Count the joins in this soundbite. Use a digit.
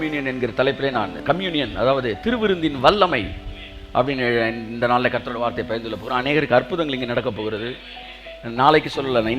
1